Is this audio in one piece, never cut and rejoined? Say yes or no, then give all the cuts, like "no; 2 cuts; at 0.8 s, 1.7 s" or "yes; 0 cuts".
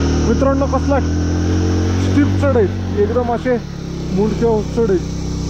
yes; 0 cuts